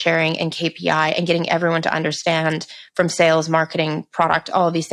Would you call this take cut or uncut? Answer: uncut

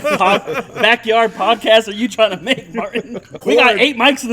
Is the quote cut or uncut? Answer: cut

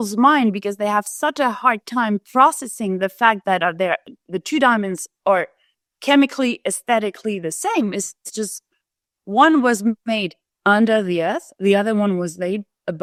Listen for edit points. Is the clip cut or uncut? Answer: uncut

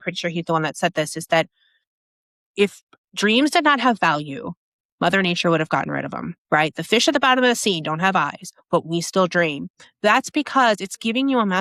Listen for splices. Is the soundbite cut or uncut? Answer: uncut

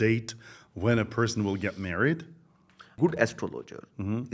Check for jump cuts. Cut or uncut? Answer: cut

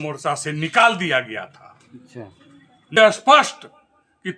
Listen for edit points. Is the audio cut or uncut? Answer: cut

